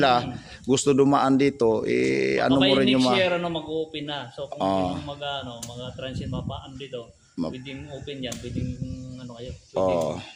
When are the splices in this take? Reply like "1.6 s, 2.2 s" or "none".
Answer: none